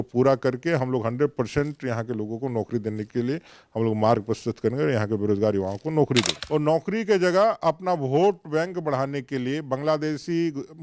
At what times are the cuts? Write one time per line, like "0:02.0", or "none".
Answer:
0:06.4